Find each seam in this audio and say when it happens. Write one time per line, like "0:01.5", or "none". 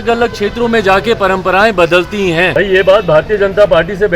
0:02.5